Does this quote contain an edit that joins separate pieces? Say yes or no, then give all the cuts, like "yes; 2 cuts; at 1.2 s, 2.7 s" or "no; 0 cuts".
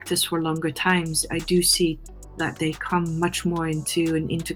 no; 0 cuts